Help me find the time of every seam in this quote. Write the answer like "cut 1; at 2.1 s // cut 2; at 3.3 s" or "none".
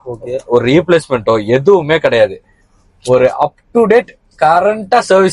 none